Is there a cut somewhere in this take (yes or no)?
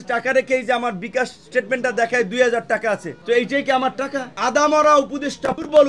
yes